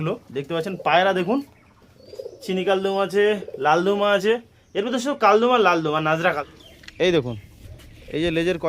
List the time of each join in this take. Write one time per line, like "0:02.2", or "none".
0:06.5